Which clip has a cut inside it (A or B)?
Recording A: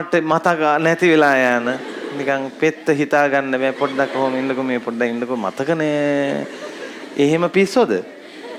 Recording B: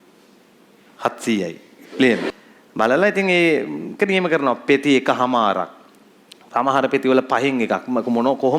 B